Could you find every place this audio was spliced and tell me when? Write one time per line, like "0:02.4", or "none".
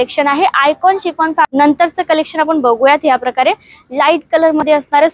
0:01.5